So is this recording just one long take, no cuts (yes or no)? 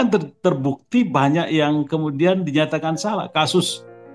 yes